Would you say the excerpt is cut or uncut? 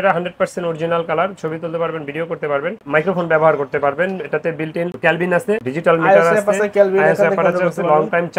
uncut